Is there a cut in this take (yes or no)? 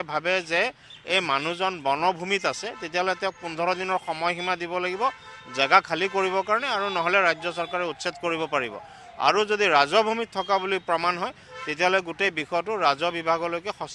no